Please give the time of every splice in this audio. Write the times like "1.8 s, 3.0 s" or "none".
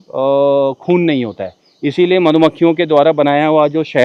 none

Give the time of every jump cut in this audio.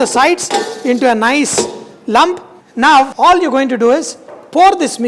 none

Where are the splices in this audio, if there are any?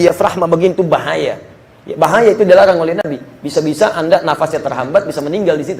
none

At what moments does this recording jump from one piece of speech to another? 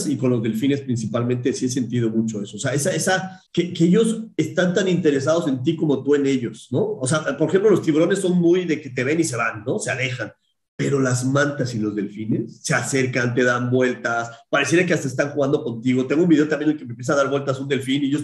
3.4 s

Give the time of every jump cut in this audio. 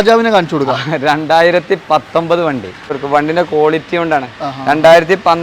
3.0 s

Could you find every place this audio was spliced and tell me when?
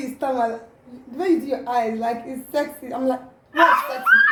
none

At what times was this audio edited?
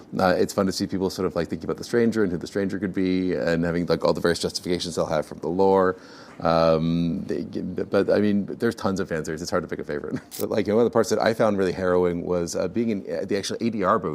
10.3 s

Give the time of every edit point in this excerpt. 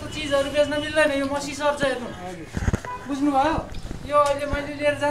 none

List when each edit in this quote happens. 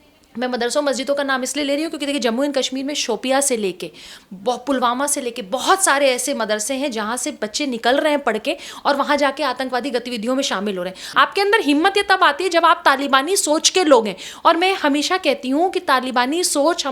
11.0 s

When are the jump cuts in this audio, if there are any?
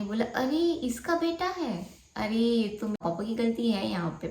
3.0 s

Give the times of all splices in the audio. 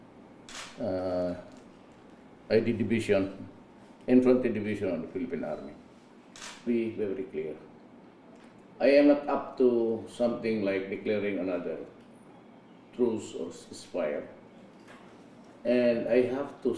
none

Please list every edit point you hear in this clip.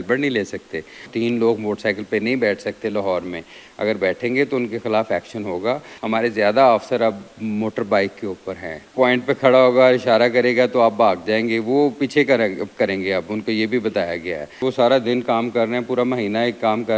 1.1 s, 5.9 s, 8.9 s, 14.6 s

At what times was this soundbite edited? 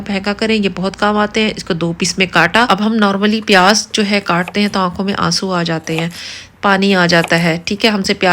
2.7 s

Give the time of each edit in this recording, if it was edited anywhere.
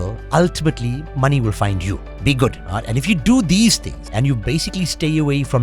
2.1 s, 2.6 s, 3.9 s

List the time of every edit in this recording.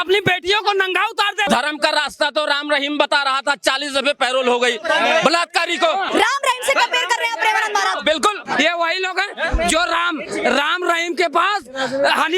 1.5 s, 6.1 s, 8.4 s

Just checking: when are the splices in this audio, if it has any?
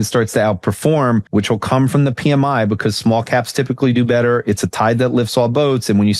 1.3 s

